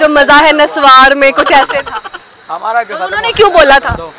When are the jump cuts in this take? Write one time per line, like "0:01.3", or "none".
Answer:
none